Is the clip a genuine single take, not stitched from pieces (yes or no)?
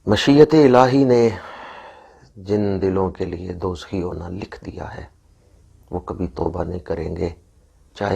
yes